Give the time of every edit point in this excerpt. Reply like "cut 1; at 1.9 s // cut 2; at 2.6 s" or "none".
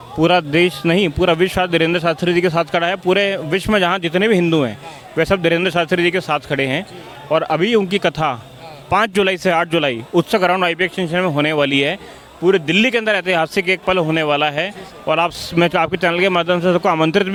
none